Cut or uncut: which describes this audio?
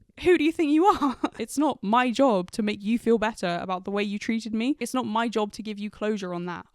cut